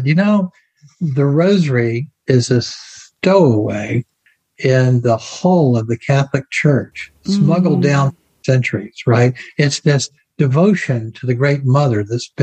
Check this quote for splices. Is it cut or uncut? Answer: uncut